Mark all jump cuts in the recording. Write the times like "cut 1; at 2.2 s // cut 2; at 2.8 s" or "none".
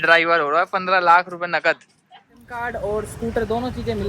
none